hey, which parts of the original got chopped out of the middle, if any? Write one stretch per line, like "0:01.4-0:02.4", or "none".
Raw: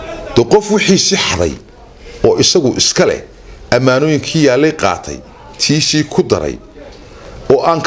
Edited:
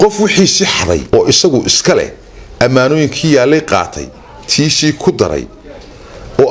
0:01.5-0:02.1